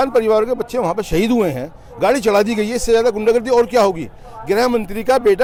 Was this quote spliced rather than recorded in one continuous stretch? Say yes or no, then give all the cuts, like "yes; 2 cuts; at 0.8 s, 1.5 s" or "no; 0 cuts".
no; 0 cuts